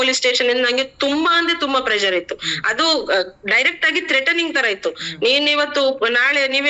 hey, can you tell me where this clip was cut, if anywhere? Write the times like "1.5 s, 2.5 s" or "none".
none